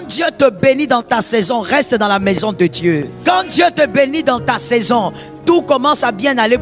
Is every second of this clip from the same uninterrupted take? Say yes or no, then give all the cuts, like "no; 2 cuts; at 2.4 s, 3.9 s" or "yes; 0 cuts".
no; 1 cut; at 3.1 s